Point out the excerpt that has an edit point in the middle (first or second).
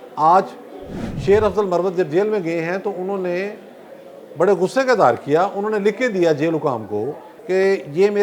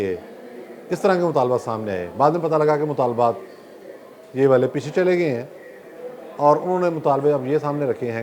first